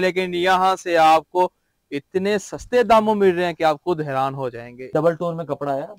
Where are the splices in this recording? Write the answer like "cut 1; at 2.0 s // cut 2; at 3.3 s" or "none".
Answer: cut 1; at 4.9 s